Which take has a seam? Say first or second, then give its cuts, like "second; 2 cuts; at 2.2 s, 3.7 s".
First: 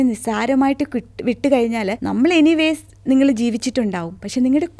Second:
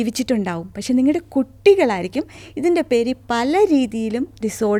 first; 1 cut; at 2.0 s